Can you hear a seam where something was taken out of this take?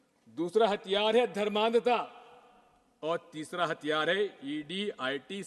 no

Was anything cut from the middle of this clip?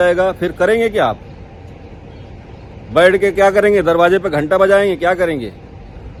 no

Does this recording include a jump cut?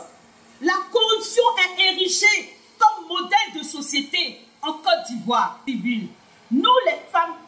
yes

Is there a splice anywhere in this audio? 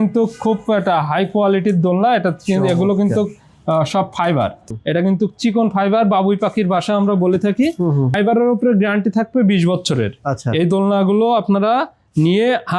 yes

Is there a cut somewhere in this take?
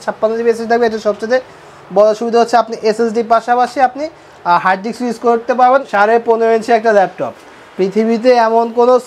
yes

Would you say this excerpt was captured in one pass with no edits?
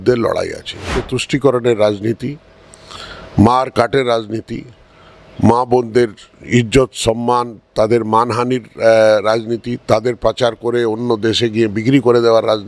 no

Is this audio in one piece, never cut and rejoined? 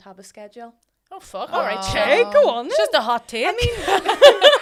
yes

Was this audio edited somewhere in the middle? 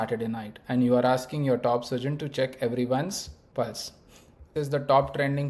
yes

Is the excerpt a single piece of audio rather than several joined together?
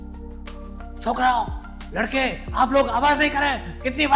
no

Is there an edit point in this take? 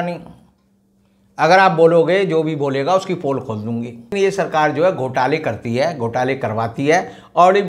yes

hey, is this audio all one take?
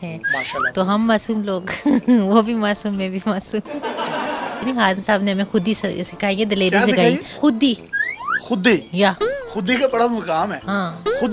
no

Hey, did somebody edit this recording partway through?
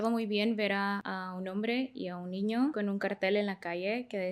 yes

